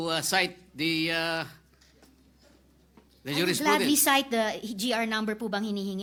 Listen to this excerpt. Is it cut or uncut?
uncut